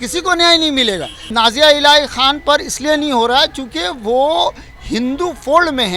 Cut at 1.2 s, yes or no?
yes